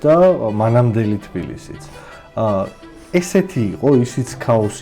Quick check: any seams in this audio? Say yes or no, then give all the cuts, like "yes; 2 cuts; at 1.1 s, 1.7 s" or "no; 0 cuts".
no; 0 cuts